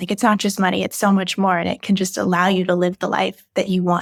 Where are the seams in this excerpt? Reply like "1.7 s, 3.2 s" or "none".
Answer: none